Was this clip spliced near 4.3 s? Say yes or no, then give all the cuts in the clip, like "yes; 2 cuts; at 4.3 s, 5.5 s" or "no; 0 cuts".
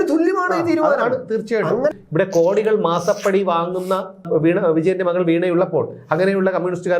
yes; 2 cuts; at 1.9 s, 4.3 s